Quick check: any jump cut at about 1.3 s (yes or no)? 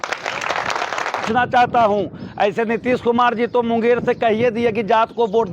yes